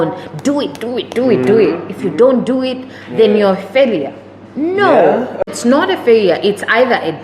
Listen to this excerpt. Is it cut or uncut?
cut